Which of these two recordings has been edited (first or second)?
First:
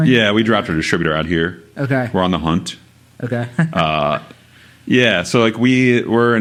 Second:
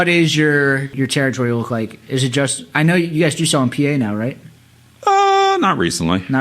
second